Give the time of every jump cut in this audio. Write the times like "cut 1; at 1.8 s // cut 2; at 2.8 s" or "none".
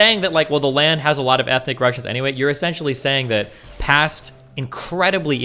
none